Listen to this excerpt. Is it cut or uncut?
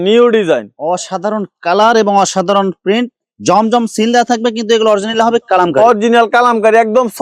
uncut